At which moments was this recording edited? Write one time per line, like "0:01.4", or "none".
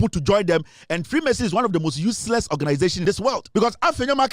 0:03.0